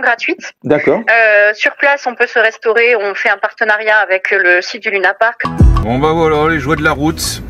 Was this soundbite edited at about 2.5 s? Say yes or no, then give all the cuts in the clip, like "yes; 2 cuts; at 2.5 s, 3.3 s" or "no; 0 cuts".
no; 1 cut; at 5.4 s